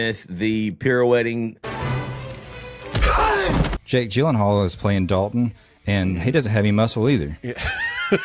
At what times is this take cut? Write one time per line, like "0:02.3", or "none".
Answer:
0:01.7
0:03.8